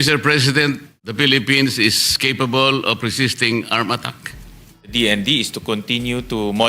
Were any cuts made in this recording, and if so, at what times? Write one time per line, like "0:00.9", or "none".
0:01.0
0:04.9